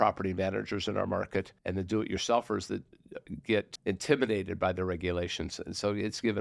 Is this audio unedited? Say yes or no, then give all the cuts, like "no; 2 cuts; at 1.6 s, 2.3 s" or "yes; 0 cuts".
no; 2 cuts; at 1.6 s, 3.7 s